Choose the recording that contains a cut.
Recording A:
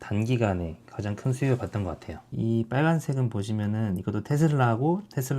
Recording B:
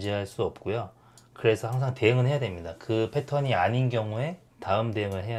A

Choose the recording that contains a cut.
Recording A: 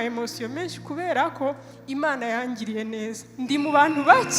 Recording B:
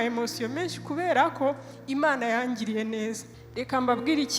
B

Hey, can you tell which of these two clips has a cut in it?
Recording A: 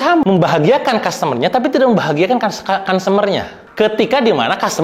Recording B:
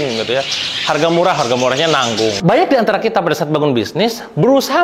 B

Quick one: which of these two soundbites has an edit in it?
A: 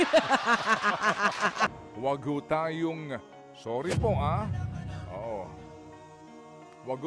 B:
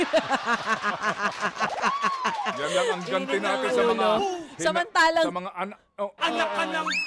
A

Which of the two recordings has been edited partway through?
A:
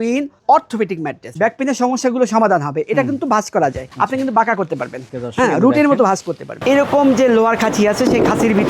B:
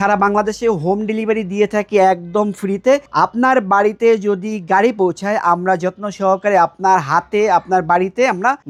A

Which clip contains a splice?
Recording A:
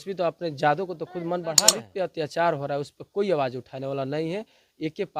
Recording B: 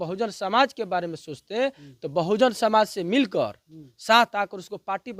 A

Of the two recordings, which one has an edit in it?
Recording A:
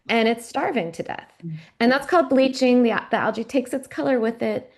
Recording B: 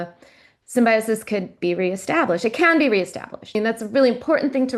B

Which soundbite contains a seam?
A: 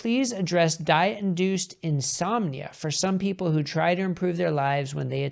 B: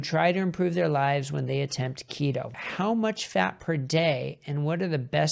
B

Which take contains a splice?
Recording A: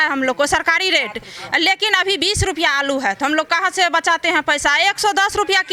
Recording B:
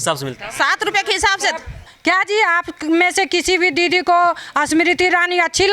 B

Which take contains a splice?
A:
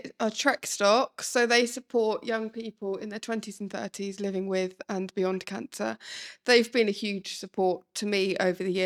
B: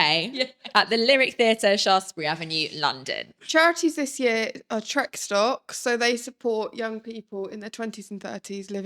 B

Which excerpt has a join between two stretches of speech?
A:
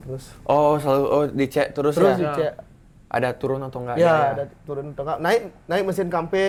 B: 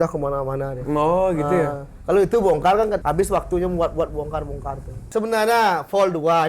B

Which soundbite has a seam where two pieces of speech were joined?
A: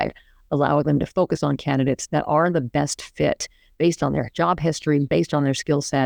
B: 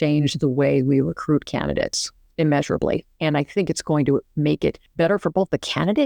B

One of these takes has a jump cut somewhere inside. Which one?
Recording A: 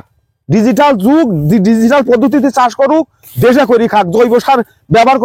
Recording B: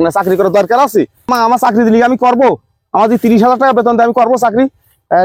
B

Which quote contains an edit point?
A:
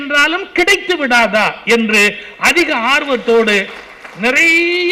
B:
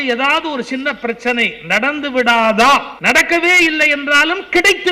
B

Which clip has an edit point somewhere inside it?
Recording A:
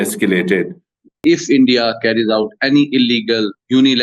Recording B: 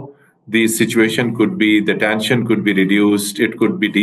A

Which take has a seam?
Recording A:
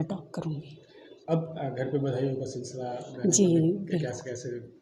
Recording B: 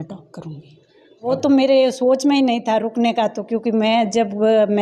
B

